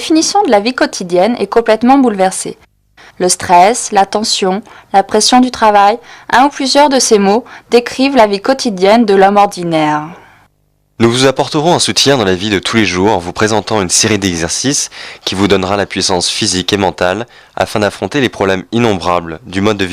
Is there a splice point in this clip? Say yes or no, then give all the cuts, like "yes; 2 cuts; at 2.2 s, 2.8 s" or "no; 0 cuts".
no; 0 cuts